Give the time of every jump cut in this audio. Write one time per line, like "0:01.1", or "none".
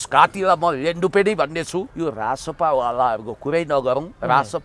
0:01.9